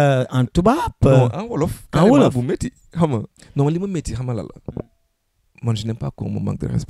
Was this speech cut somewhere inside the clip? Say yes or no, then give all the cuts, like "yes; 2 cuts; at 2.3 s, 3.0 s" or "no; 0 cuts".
yes; 1 cut; at 3.4 s